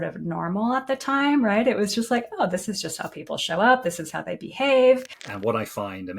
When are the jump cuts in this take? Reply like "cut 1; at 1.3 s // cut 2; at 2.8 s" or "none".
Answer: cut 1; at 5.1 s